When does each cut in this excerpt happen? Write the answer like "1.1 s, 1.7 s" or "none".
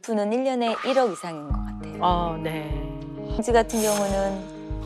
3.4 s

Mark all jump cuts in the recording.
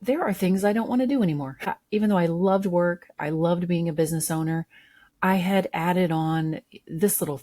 1.7 s

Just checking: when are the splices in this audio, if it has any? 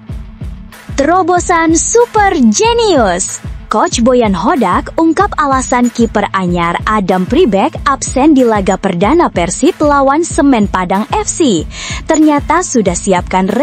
1.0 s

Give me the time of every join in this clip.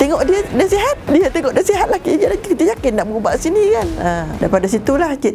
1.0 s

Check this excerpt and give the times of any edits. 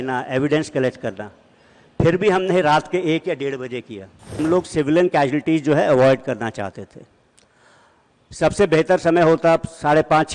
4.4 s

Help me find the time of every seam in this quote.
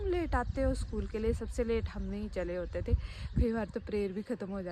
none

